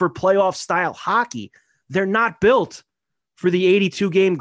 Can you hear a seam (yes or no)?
no